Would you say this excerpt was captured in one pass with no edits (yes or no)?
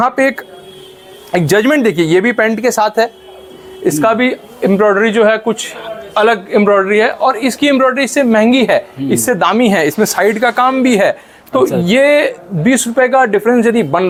yes